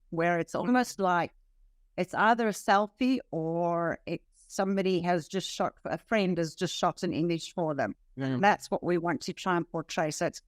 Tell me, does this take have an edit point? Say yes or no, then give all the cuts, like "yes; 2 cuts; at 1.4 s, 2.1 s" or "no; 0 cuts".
yes; 1 cut; at 8.1 s